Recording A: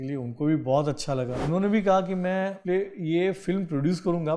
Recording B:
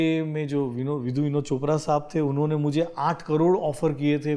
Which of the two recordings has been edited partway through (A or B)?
A